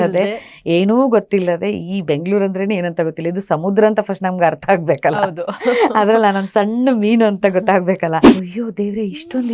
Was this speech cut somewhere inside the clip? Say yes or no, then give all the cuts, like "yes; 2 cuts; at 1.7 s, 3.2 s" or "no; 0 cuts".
yes; 1 cut; at 8.4 s